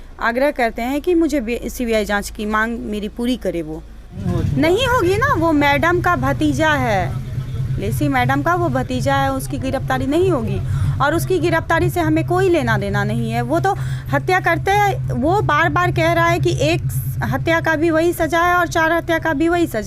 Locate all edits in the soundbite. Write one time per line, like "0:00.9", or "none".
0:04.2